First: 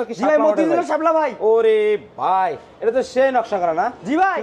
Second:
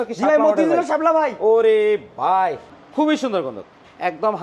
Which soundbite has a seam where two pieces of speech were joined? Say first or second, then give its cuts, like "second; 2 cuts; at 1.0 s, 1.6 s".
second; 1 cut; at 2.7 s